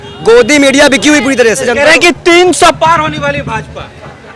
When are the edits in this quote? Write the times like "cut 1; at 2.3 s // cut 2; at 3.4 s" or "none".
cut 1; at 1.7 s